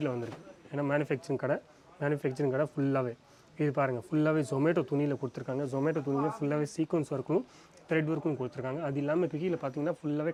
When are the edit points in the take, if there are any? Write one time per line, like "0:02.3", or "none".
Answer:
none